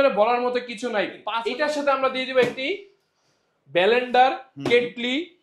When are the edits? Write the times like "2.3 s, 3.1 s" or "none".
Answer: 1.3 s